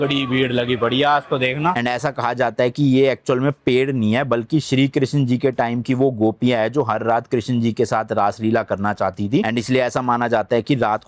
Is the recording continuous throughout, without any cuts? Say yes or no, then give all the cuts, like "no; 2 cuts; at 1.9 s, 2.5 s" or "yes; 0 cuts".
no; 1 cut; at 1.8 s